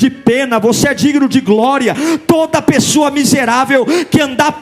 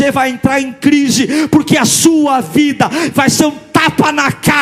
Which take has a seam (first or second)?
first